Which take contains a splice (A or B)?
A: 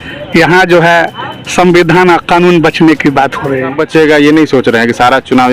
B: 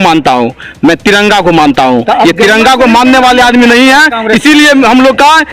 A